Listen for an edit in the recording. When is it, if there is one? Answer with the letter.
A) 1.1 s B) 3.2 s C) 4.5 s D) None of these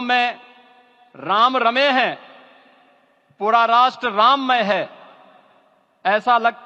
D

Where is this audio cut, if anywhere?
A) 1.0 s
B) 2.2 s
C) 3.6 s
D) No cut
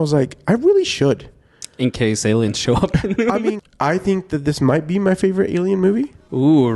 C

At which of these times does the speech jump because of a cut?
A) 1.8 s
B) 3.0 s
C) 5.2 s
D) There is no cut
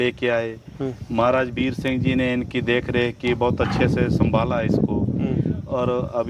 D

